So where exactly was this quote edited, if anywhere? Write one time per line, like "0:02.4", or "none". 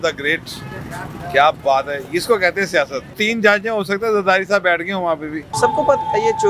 0:03.2
0:05.4